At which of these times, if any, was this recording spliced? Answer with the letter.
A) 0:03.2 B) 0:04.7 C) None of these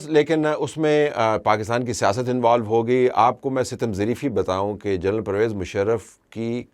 C